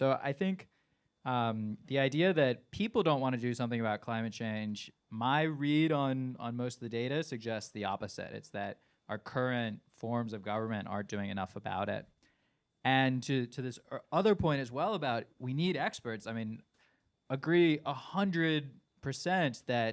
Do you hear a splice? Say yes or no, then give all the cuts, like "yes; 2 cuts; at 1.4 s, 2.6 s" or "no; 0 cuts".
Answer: no; 0 cuts